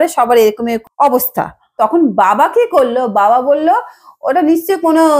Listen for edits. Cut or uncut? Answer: cut